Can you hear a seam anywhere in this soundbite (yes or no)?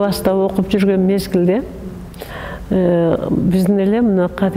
no